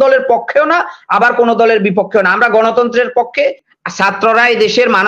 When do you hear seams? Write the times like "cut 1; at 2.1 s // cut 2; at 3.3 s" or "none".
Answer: cut 1; at 3.4 s